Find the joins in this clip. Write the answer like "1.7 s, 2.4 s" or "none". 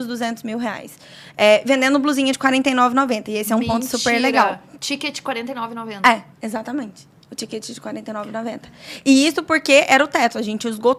none